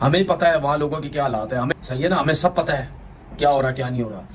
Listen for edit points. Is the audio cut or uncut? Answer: uncut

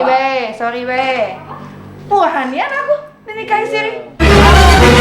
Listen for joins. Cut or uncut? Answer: cut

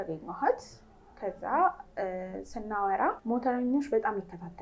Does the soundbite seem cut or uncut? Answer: cut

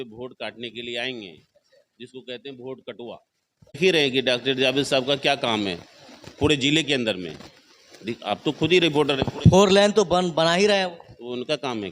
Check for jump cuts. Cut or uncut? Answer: cut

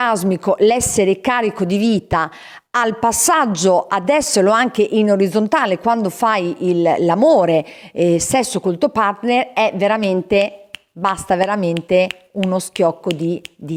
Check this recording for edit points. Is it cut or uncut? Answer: uncut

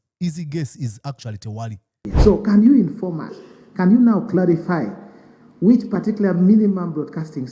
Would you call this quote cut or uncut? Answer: cut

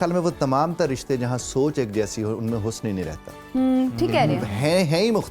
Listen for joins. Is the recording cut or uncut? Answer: uncut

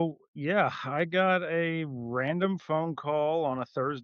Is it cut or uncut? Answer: uncut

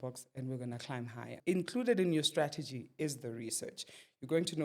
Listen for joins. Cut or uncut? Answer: cut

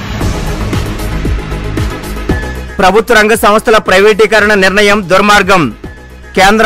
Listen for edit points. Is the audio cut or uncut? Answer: cut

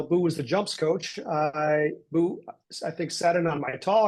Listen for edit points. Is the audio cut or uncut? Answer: uncut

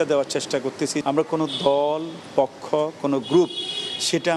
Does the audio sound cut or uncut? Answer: cut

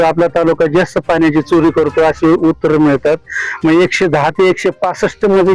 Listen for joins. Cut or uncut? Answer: uncut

